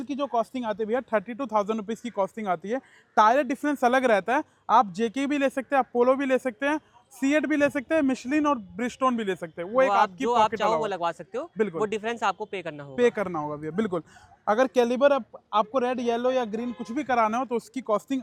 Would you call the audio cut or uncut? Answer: uncut